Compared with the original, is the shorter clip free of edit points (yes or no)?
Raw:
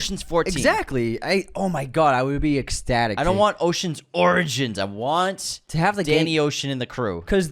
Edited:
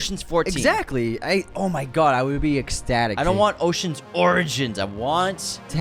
yes